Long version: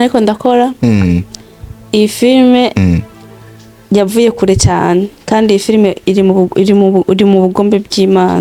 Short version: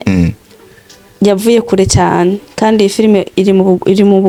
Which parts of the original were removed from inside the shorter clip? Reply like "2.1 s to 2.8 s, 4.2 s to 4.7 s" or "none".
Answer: none